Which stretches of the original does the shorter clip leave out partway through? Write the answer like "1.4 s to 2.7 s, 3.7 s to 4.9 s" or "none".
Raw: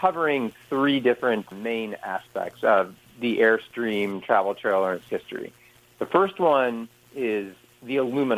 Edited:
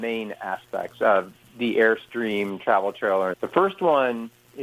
5.0 s to 6.0 s